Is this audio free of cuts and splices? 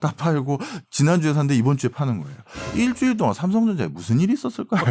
yes; 0 cuts

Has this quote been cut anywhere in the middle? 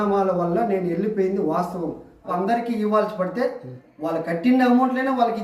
yes; 1 cut; at 2.3 s

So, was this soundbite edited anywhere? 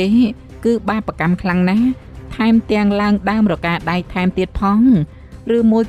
no; 0 cuts

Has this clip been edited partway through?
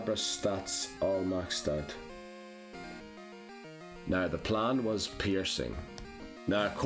yes; 1 cut; at 2.9 s

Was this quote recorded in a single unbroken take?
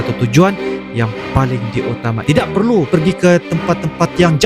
no; 1 cut; at 2.2 s

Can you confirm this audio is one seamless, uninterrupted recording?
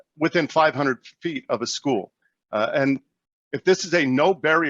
yes; 0 cuts

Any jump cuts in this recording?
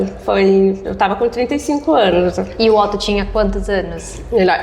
no; 0 cuts

